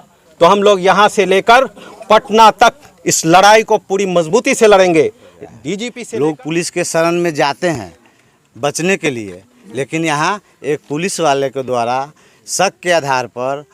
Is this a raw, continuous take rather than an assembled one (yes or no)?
no